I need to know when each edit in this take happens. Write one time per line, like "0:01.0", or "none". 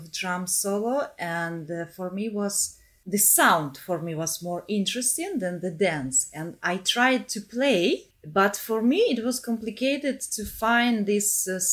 0:08.2